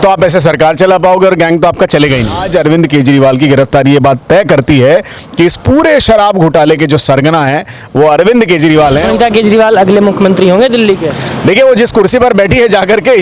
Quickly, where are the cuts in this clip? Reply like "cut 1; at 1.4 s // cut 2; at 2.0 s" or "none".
cut 1; at 2.4 s // cut 2; at 9.1 s